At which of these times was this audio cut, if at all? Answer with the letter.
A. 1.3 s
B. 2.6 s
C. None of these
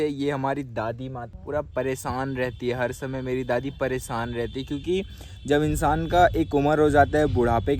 A